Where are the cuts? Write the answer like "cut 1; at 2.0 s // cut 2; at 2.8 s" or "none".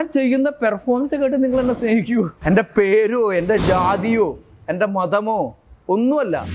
cut 1; at 2.4 s

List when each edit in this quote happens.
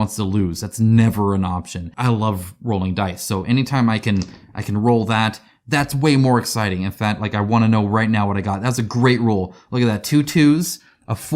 cut 1; at 1.9 s

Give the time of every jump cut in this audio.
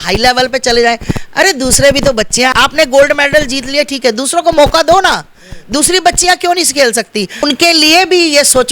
cut 1; at 2.5 s // cut 2; at 7.4 s

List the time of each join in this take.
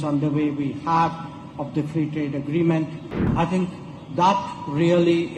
cut 1; at 3.3 s

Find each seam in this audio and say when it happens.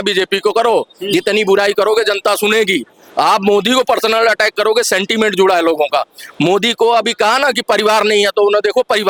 none

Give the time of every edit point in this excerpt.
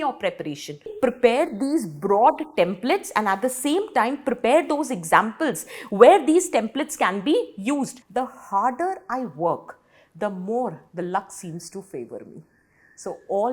cut 1; at 0.9 s // cut 2; at 8.0 s

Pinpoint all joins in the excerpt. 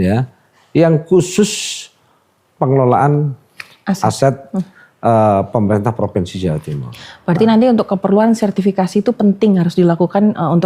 none

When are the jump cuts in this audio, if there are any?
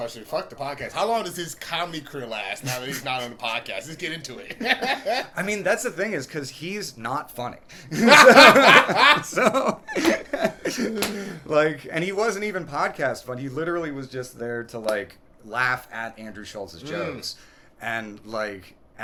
none

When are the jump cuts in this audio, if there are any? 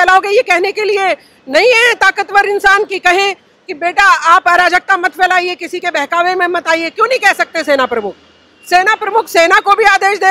none

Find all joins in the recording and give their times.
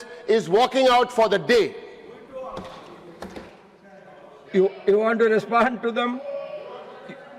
none

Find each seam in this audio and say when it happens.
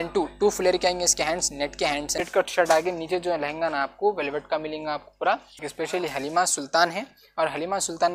cut 1; at 2.2 s // cut 2; at 5.6 s

